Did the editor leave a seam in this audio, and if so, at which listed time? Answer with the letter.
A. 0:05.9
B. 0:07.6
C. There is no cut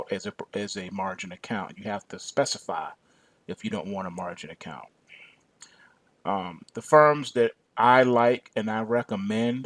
B